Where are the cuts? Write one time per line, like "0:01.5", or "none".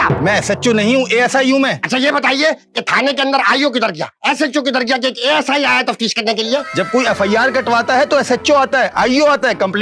none